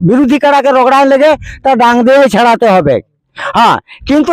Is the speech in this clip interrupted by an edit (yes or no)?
no